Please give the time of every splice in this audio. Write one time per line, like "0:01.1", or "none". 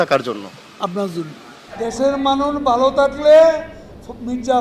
none